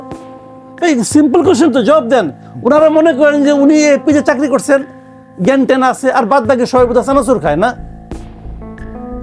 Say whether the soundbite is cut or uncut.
uncut